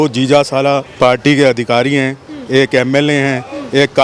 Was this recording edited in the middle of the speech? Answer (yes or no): no